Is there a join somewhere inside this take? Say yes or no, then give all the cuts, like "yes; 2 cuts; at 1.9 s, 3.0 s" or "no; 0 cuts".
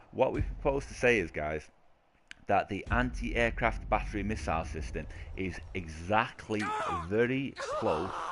yes; 1 cut; at 3.8 s